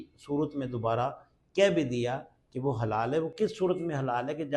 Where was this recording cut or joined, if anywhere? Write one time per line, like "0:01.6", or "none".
none